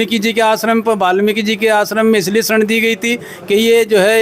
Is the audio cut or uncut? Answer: uncut